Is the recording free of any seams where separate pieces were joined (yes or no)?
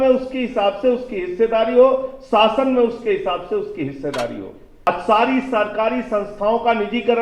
no